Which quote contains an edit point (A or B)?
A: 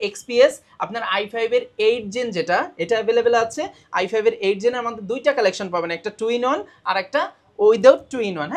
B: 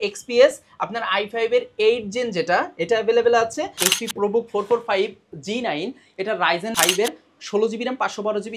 B